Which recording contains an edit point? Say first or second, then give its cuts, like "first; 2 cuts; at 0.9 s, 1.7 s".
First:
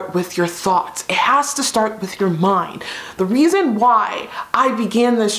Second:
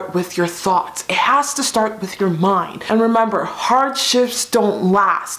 second; 1 cut; at 2.8 s